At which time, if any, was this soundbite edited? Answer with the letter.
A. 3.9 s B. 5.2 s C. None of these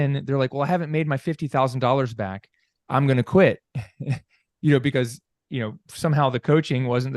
C